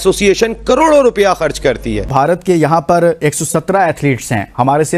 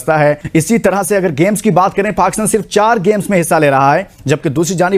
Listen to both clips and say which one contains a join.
first; 1 cut; at 2.1 s

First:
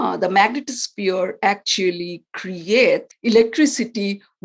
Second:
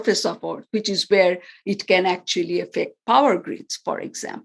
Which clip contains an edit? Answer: first; 1 cut; at 3.1 s

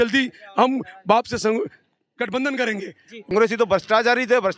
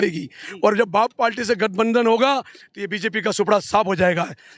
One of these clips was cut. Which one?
first; 1 cut; at 3.2 s

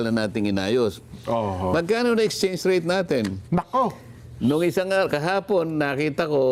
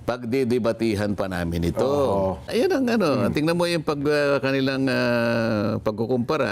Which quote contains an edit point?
second; 1 cut; at 2.5 s

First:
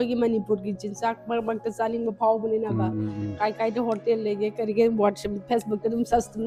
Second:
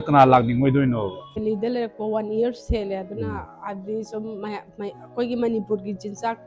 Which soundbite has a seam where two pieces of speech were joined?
second; 1 cut; at 1.4 s

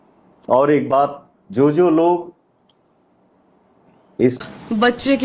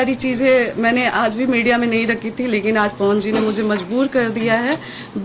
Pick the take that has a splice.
first; 1 cut; at 4.3 s

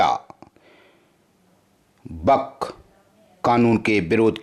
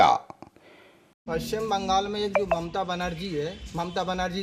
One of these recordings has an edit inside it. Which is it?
second; 1 cut; at 1.1 s

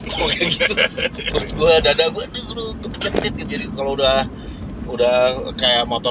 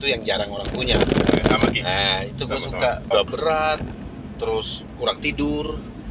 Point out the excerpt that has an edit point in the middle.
second; 1 cut; at 3.1 s

